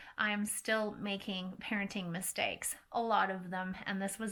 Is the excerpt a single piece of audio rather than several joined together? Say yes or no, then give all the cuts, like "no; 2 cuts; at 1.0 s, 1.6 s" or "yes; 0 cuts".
yes; 0 cuts